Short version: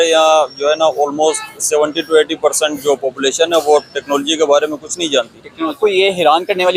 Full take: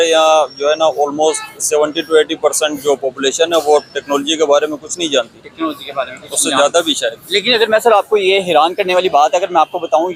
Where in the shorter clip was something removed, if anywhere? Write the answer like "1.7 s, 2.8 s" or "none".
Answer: 5.8 s